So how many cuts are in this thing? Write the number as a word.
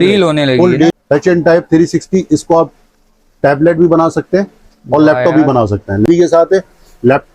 two